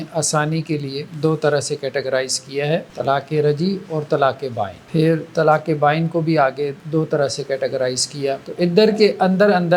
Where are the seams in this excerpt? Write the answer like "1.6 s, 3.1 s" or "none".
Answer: 1.0 s, 2.9 s, 4.8 s, 6.8 s, 8.5 s

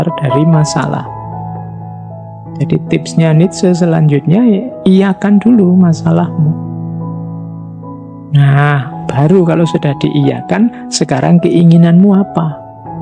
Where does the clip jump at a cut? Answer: 6.5 s, 8.0 s

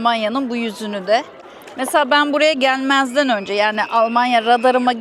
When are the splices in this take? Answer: none

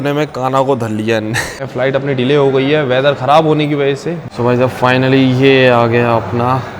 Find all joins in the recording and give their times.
1.6 s, 4.2 s

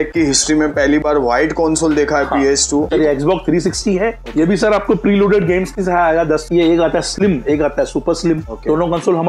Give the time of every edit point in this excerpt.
2.9 s, 6.5 s

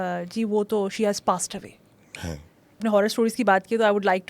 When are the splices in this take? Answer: 2.8 s

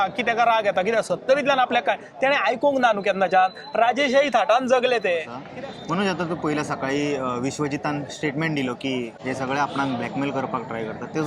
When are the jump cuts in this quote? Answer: 5.4 s, 9.2 s

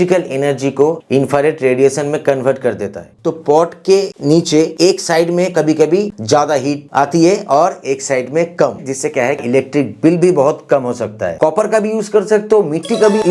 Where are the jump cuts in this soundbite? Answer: 3.1 s, 8.8 s, 11.3 s

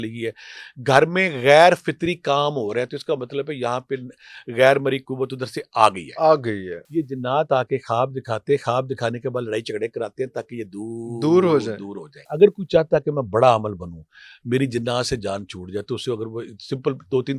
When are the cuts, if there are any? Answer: 6.7 s, 12.2 s

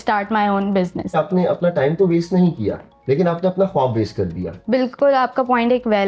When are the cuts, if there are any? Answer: 1.2 s, 4.5 s

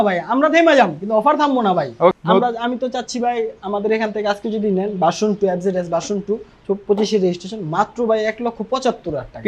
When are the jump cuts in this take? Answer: 2.1 s

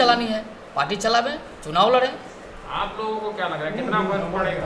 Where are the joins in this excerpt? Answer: none

